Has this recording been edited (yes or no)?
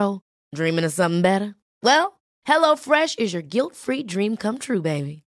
no